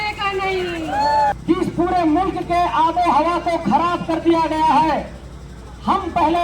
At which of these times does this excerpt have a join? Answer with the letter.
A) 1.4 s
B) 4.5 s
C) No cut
A